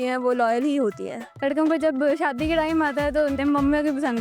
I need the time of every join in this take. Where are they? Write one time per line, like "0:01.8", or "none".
0:01.4
0:03.4